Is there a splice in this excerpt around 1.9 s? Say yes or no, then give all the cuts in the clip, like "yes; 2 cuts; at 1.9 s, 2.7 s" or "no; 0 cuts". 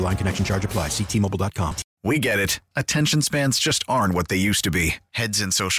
yes; 1 cut; at 1.9 s